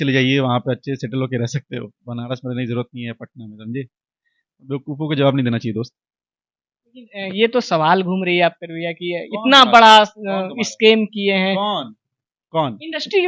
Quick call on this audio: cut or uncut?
uncut